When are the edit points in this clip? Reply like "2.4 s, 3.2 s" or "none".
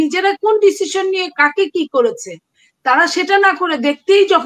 none